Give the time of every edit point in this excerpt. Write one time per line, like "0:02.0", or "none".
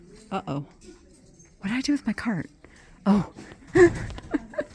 none